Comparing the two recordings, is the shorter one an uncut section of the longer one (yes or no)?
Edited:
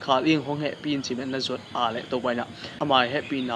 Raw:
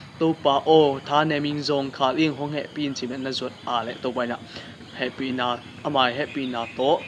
no